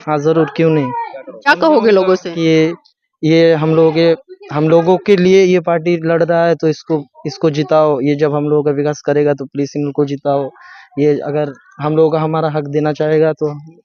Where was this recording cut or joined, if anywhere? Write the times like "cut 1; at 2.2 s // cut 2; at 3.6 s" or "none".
cut 1; at 1.5 s